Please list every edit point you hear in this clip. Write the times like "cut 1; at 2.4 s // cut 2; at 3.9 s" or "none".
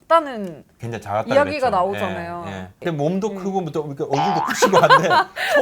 cut 1; at 2.7 s

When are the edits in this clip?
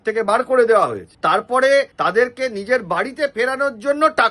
cut 1; at 1.1 s // cut 2; at 1.9 s

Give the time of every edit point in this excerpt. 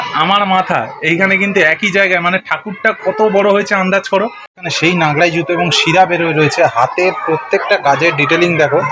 cut 1; at 4.6 s

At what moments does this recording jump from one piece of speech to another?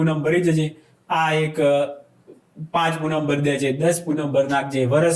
none

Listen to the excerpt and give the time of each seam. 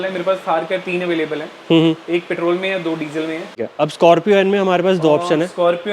cut 1; at 3.5 s

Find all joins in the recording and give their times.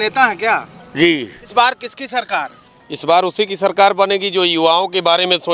cut 1; at 1.4 s

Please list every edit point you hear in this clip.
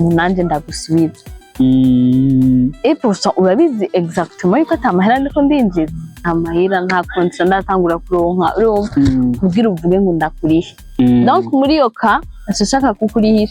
cut 1; at 6.2 s

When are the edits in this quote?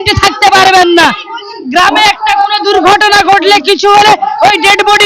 cut 1; at 1.9 s

